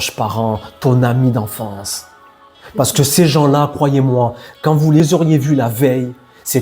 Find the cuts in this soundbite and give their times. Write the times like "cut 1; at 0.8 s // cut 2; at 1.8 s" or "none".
cut 1; at 5.0 s

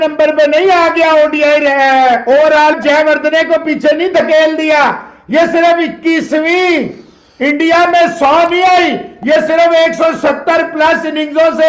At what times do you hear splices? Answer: none

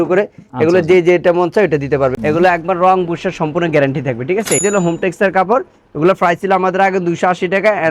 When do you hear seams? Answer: cut 1; at 2.2 s // cut 2; at 4.6 s

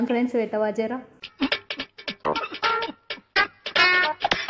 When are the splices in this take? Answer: cut 1; at 0.9 s

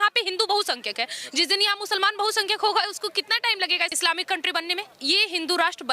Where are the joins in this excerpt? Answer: cut 1; at 3.9 s // cut 2; at 4.9 s

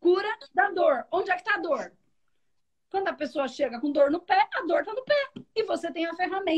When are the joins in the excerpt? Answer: none

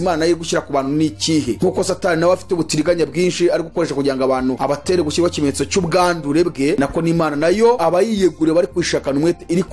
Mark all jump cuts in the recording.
cut 1; at 1.6 s // cut 2; at 4.6 s // cut 3; at 6.8 s // cut 4; at 7.8 s

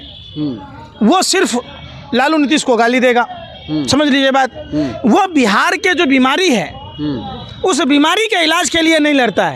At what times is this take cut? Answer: none

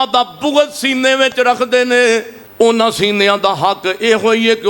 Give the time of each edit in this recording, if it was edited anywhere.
cut 1; at 2.4 s

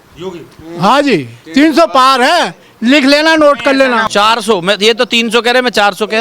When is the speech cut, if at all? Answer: cut 1; at 4.0 s

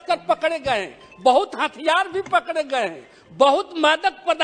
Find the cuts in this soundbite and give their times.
none

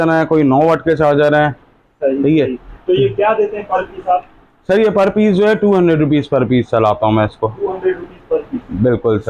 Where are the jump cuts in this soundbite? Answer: none

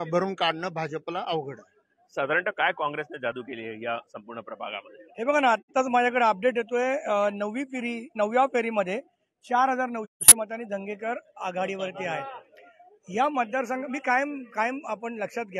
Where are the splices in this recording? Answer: none

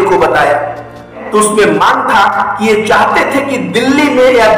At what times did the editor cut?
cut 1; at 1.2 s

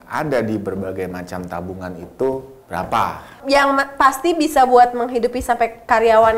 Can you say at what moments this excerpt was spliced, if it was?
cut 1; at 3.4 s

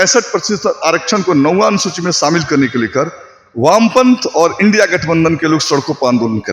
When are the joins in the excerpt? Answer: none

